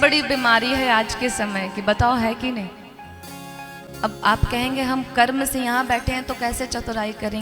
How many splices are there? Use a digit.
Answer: 1